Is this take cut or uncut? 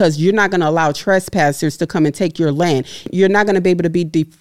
cut